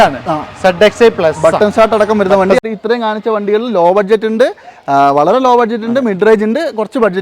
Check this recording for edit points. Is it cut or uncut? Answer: cut